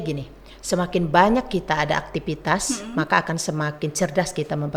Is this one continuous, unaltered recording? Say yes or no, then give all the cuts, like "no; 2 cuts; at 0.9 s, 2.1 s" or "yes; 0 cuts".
yes; 0 cuts